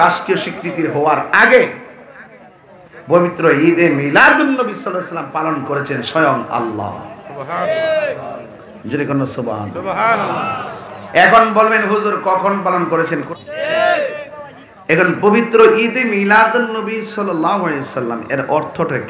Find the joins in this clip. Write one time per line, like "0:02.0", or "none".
0:13.3